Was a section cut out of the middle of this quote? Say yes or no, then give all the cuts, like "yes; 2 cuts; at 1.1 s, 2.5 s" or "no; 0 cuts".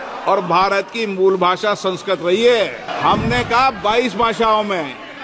yes; 1 cut; at 2.9 s